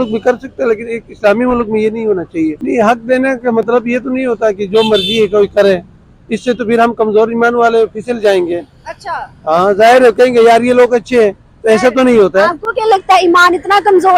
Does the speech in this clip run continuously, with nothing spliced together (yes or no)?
no